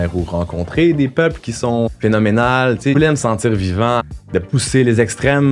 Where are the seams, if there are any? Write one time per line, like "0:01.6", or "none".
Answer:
0:01.9
0:02.9
0:04.1